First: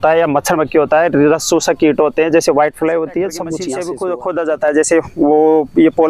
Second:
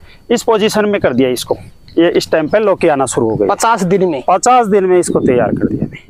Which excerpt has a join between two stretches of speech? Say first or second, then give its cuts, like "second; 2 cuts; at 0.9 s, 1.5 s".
first; 1 cut; at 3.6 s